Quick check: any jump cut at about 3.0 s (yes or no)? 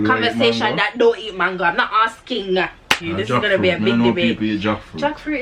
yes